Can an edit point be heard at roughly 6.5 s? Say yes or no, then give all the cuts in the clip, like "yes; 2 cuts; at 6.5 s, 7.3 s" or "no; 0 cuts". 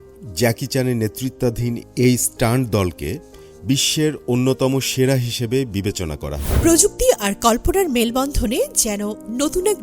yes; 1 cut; at 6.5 s